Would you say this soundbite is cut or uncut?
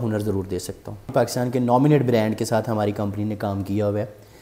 cut